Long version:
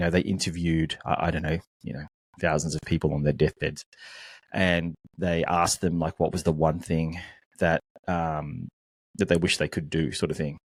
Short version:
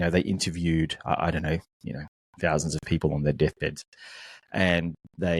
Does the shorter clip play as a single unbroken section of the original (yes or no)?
yes